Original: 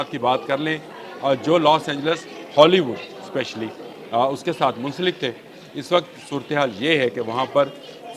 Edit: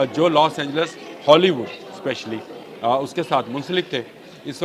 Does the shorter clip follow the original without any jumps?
yes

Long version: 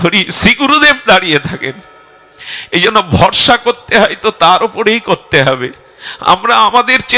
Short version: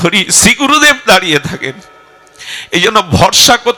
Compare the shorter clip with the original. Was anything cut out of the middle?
no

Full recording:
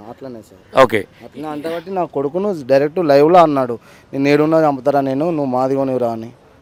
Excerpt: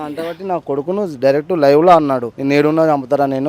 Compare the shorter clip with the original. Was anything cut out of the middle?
yes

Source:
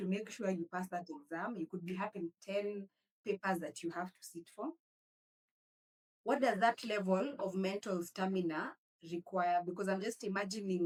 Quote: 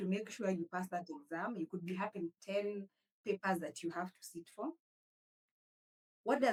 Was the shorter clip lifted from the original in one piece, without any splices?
yes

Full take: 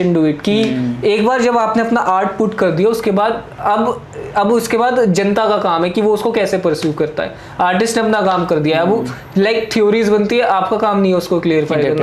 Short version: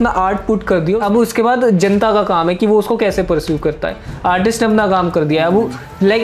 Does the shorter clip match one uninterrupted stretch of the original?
no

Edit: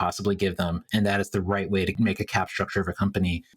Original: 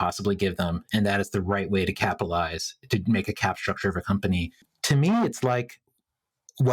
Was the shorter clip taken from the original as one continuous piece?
no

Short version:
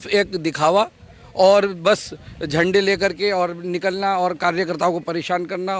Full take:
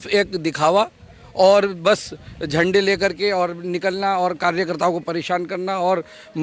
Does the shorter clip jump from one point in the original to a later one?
no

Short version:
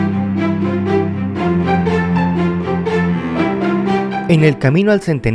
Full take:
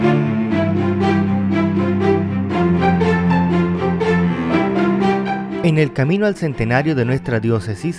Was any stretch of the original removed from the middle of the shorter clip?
yes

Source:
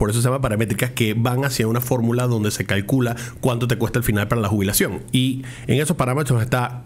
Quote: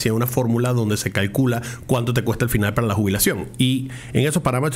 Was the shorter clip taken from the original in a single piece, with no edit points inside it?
yes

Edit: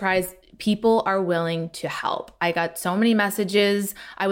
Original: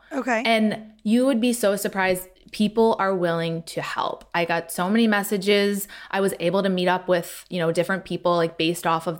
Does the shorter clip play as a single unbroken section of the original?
yes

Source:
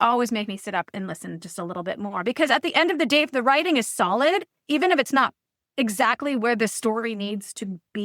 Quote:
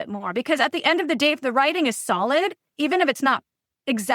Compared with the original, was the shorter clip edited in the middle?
no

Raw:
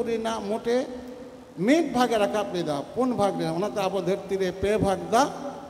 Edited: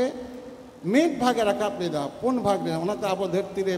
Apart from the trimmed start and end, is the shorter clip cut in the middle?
no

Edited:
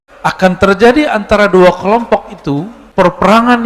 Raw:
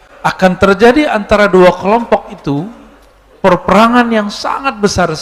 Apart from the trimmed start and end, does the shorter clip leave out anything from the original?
yes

